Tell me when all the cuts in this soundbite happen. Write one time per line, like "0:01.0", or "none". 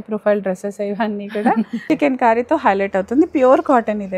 0:01.8